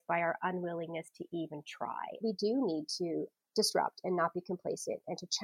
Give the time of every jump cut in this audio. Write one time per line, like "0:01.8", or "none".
0:02.2
0:03.4